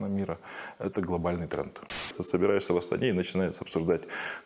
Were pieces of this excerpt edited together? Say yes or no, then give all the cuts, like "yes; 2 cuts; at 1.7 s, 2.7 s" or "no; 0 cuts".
yes; 1 cut; at 2.2 s